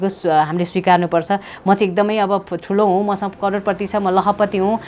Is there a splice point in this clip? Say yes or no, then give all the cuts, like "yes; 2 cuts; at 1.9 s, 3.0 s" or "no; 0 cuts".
no; 0 cuts